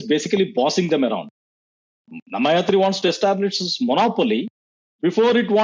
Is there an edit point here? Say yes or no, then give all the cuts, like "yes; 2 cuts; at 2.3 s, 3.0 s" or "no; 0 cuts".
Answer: no; 0 cuts